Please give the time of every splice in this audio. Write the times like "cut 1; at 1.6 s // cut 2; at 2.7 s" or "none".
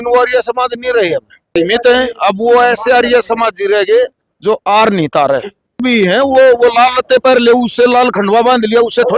cut 1; at 1.5 s // cut 2; at 5.8 s